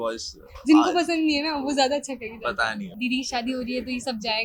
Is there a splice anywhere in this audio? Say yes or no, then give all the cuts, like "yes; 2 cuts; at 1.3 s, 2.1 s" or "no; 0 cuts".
yes; 1 cut; at 2.9 s